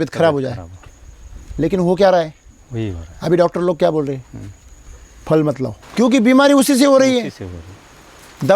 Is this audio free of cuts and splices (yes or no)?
no